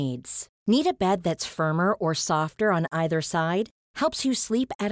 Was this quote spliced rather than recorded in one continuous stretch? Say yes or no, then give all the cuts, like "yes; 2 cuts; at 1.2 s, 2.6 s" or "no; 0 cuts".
no; 0 cuts